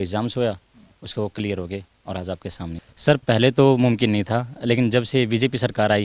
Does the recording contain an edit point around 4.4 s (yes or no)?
no